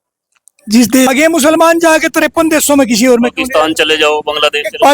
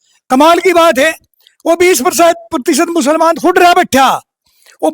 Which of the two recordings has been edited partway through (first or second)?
first